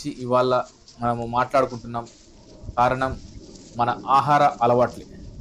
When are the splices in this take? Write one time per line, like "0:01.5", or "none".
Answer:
none